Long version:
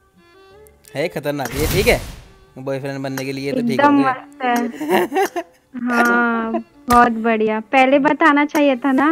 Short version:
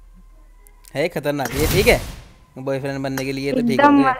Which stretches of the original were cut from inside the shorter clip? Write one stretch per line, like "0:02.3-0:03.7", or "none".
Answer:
none